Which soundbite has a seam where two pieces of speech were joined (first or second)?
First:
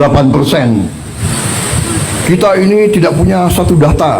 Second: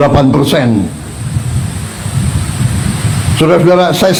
first